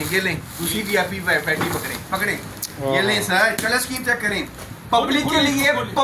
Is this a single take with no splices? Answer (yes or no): yes